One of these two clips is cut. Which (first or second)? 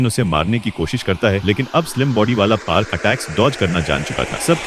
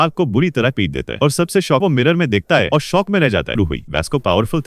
second